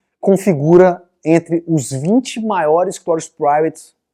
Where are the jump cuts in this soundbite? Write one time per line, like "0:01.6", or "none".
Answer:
none

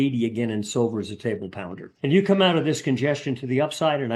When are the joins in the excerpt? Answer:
0:01.8

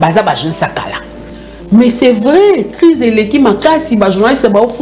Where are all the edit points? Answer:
0:01.3

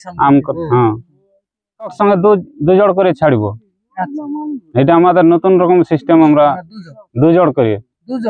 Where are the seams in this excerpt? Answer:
0:01.9

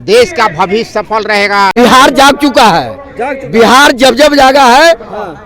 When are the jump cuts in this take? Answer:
0:01.7

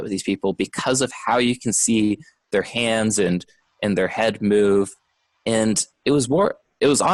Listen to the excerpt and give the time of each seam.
none

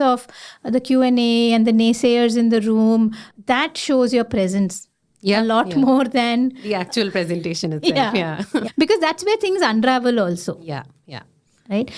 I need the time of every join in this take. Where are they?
0:03.3
0:08.7

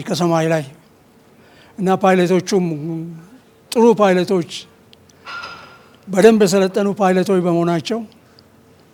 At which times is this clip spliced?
none

